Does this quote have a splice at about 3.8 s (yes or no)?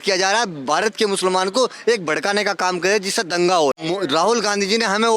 yes